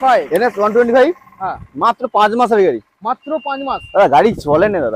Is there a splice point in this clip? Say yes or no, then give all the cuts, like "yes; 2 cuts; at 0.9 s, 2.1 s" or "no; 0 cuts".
no; 0 cuts